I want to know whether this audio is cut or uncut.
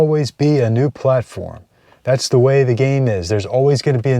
uncut